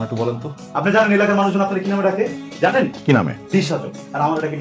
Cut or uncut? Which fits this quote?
uncut